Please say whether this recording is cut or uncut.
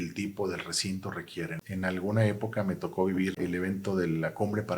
cut